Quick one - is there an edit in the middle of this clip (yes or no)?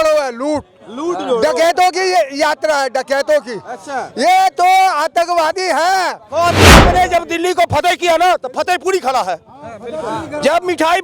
yes